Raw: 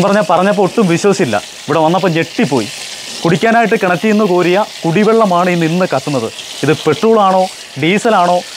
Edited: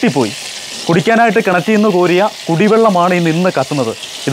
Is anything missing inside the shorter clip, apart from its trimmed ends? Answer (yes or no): no